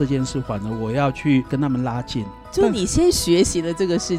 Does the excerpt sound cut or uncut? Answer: cut